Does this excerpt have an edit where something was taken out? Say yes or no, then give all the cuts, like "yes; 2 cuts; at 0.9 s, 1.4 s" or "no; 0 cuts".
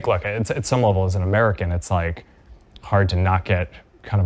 no; 0 cuts